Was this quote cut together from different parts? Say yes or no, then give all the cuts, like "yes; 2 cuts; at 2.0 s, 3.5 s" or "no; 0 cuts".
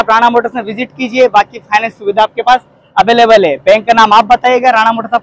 no; 0 cuts